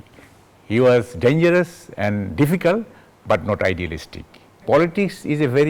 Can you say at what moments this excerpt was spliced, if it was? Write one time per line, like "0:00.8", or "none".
0:04.6

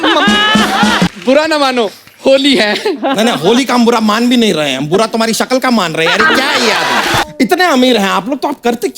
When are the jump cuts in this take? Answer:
0:01.1
0:07.2

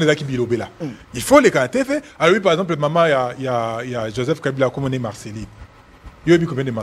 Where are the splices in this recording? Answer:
none

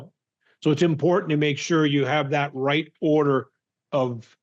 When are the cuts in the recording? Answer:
none

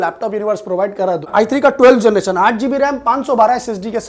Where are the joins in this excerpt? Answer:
0:01.3

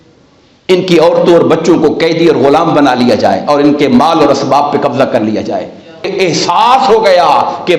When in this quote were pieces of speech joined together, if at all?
0:06.1

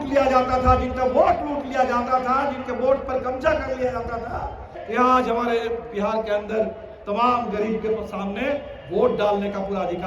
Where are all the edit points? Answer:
0:04.8

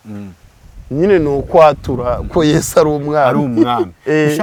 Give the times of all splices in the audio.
none

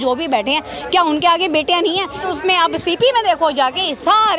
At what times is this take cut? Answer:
0:02.2

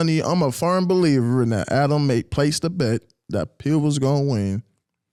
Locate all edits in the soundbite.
none

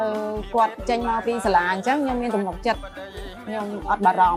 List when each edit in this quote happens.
none

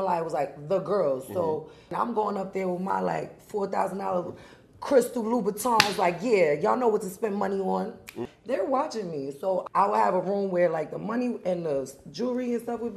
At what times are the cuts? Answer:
0:01.8
0:08.2
0:09.6

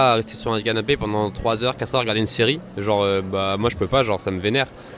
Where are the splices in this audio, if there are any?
none

